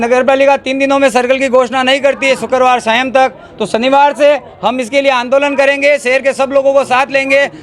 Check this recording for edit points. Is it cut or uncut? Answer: uncut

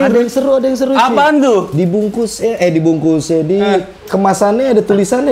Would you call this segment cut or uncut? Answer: uncut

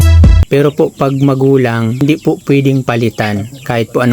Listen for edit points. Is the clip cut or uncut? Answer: cut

